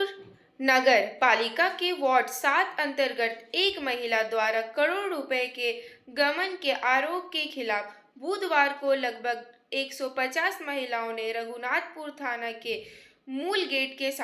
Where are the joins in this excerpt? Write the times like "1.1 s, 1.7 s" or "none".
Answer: none